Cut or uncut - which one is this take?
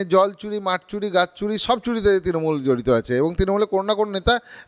uncut